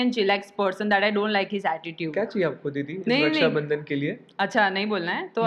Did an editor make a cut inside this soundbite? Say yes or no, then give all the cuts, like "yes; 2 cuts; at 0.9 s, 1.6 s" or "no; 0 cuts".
no; 0 cuts